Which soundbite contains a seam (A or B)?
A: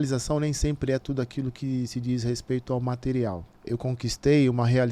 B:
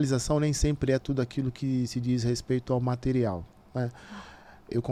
A